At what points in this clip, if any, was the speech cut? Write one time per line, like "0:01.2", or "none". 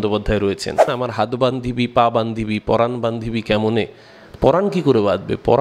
0:01.0